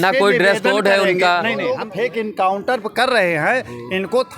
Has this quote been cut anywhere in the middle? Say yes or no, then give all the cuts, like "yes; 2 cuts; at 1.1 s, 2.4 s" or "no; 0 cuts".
yes; 1 cut; at 1.8 s